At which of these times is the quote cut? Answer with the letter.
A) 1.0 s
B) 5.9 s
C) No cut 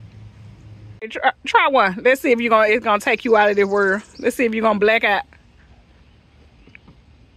A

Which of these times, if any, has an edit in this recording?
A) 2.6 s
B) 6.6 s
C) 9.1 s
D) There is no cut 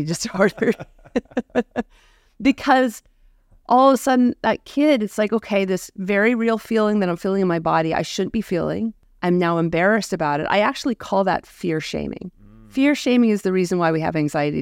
C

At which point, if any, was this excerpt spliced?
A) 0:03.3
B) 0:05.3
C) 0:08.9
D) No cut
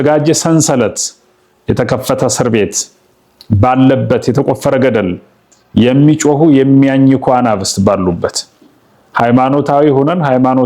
D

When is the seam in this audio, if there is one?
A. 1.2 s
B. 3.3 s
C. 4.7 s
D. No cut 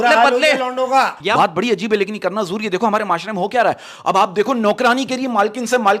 A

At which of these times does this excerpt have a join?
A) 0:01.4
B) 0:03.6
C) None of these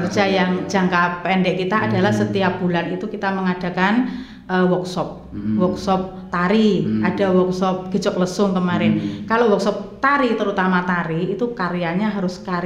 C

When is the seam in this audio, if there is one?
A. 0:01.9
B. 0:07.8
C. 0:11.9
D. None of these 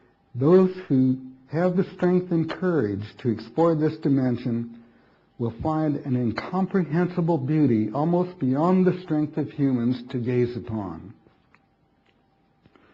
B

